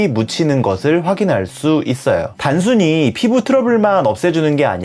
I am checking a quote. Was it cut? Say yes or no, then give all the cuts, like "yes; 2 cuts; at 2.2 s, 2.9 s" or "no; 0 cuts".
no; 0 cuts